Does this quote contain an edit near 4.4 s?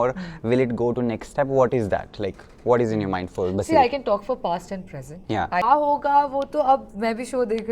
no; 1 cut; at 5.6 s

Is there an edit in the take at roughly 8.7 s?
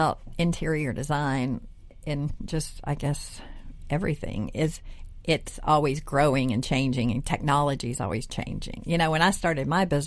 no; 1 cut; at 1.9 s

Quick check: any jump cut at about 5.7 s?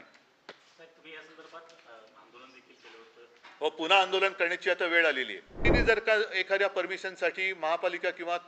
yes; 1 cut; at 5.7 s

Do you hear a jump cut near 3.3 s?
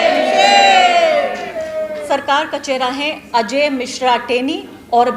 no; 1 cut; at 2.0 s

